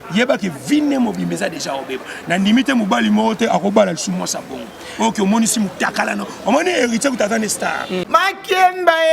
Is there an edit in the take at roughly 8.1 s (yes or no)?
yes